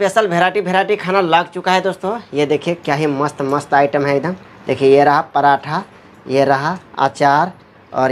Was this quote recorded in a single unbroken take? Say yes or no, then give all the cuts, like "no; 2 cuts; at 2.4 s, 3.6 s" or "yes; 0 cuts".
yes; 0 cuts